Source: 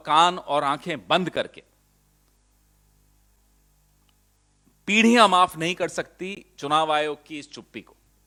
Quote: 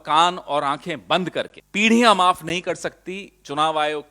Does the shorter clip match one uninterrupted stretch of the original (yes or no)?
no